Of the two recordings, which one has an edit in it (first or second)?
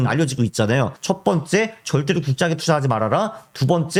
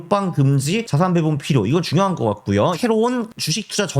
second